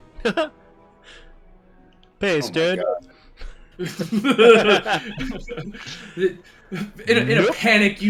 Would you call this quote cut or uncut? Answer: uncut